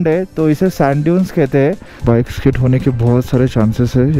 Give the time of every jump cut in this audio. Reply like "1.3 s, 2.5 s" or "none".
1.9 s